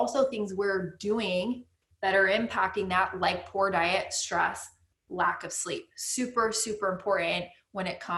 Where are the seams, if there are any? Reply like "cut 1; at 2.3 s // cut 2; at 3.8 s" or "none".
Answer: none